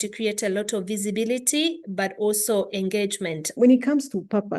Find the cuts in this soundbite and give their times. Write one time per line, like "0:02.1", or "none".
0:03.4